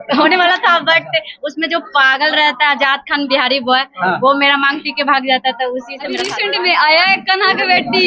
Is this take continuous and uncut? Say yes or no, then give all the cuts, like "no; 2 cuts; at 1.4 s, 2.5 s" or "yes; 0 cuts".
no; 1 cut; at 6.3 s